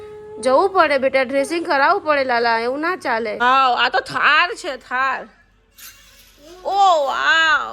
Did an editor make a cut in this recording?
yes; 1 cut; at 3.4 s

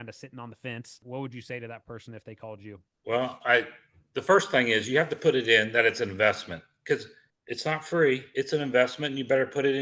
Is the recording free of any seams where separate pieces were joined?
no; 2 cuts; at 1.0 s, 8.3 s

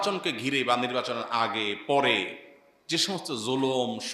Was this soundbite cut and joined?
no; 0 cuts

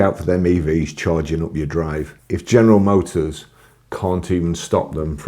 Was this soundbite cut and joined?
yes; 1 cut; at 2.2 s

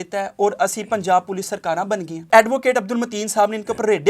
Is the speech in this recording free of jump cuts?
no; 1 cut; at 2.3 s

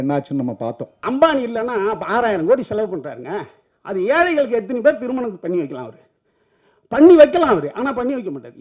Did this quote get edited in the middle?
yes; 1 cut; at 0.9 s

